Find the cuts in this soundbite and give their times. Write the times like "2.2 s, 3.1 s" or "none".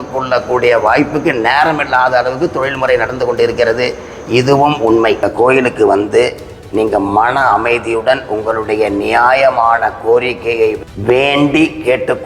5.2 s, 10.8 s